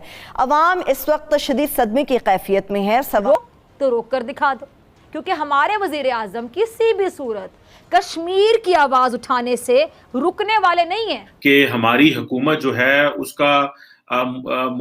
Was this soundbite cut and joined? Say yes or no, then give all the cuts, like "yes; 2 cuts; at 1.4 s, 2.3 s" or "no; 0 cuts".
yes; 2 cuts; at 3.2 s, 11.2 s